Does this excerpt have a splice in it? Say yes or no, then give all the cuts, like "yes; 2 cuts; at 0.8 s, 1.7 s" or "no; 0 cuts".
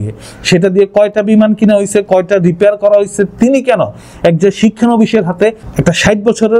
yes; 1 cut; at 5.6 s